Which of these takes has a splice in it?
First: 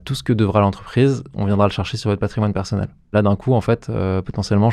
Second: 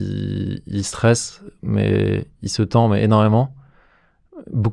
first; 1 cut; at 3.1 s

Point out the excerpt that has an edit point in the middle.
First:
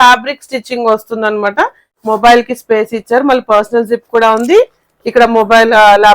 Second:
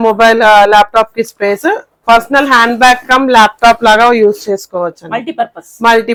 first; 1 cut; at 1.9 s

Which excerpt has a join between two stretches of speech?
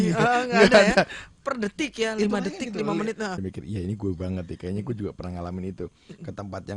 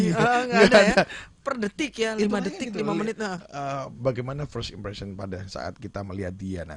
first; 1 cut; at 3.4 s

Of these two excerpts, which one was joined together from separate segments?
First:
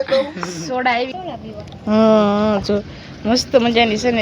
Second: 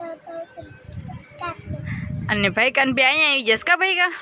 first; 1 cut; at 1.1 s

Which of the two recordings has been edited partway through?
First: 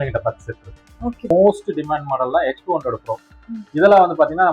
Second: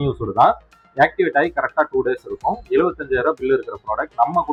first; 1 cut; at 1.3 s

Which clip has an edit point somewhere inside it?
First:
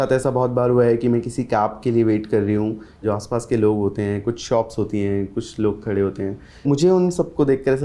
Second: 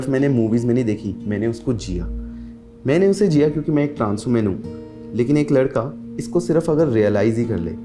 first; 2 cuts; at 3.0 s, 6.6 s

